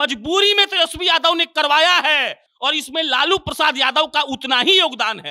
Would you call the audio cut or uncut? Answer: uncut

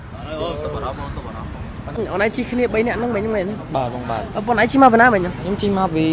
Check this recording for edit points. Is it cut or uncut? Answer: uncut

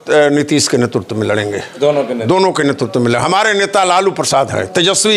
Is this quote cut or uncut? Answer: uncut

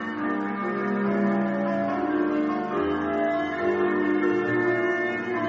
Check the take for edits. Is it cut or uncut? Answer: uncut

